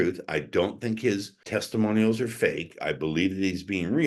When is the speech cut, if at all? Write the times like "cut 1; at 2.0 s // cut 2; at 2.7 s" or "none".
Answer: cut 1; at 1.4 s